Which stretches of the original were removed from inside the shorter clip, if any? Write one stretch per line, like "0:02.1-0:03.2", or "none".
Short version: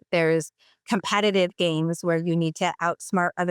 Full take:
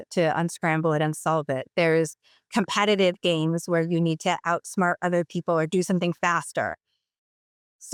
none